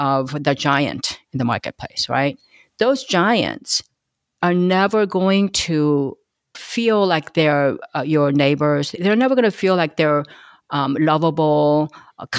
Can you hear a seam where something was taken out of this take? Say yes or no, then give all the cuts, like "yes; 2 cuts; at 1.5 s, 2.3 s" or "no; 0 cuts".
no; 0 cuts